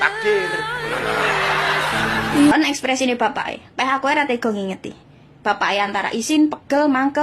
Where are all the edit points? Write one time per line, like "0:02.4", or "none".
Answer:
0:02.5